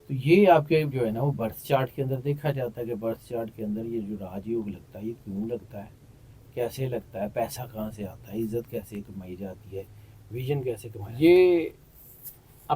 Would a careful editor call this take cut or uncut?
cut